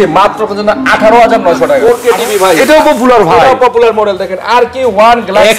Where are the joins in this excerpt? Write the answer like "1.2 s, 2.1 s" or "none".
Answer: 1.8 s